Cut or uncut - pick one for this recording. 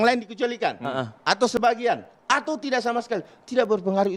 uncut